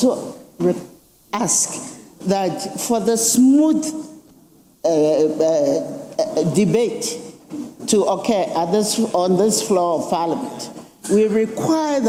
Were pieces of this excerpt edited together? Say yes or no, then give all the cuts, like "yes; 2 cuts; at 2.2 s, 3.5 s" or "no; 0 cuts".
no; 0 cuts